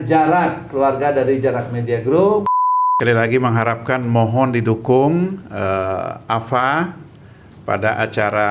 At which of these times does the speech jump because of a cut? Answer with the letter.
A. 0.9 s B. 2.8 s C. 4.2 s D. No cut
B